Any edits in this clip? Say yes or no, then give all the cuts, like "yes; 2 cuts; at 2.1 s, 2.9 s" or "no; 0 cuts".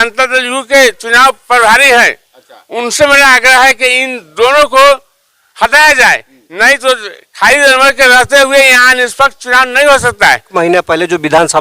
yes; 1 cut; at 10.5 s